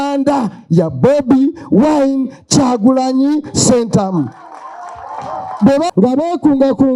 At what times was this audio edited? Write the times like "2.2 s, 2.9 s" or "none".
5.9 s